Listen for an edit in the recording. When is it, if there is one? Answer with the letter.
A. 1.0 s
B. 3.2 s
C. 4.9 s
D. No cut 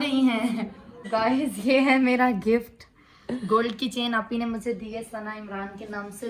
A